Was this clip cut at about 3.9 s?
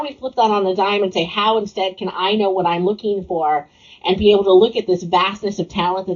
no; 0 cuts

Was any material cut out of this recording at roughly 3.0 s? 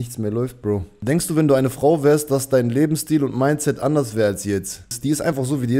no; 2 cuts; at 0.9 s, 5.0 s

